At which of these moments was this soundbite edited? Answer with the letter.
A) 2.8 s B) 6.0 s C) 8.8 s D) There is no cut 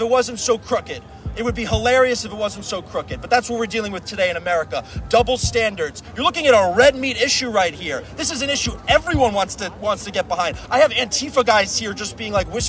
B